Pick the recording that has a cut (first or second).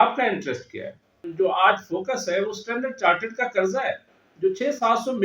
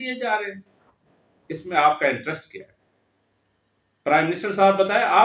first